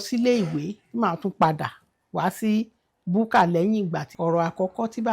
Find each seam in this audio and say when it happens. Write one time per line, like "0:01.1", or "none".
0:04.1